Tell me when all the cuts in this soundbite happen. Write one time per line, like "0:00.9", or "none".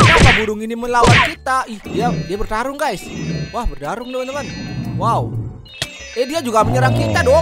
0:01.8